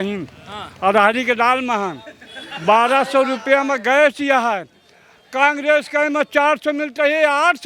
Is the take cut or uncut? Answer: uncut